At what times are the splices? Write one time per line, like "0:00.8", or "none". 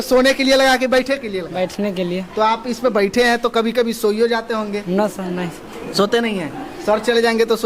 none